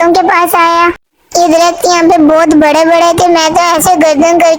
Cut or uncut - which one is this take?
uncut